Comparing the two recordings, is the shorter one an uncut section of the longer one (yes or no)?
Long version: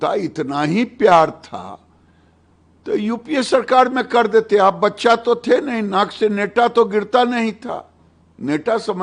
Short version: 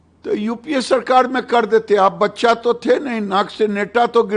yes